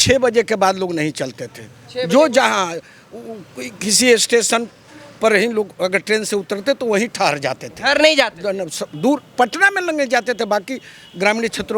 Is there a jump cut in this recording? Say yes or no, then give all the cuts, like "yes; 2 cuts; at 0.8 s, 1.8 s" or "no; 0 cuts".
no; 0 cuts